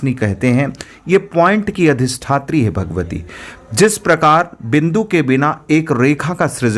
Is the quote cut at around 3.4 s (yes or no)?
no